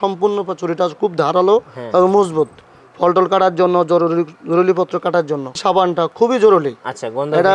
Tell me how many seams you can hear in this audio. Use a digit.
1